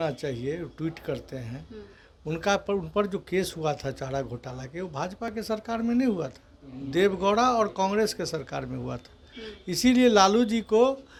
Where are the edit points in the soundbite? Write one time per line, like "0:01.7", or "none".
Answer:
none

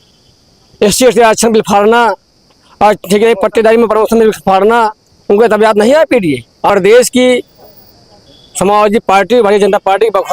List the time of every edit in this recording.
0:06.7

